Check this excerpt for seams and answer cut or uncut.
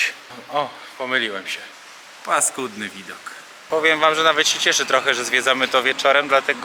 cut